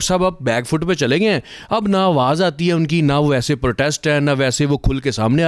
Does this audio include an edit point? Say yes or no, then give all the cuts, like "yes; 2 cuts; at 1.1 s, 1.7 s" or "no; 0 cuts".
no; 0 cuts